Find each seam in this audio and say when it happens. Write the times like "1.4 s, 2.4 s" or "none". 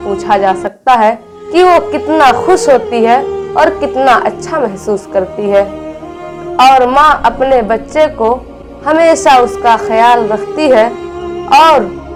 none